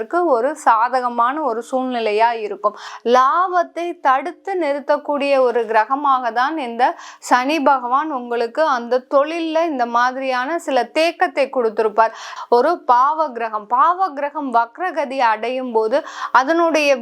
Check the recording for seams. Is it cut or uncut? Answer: cut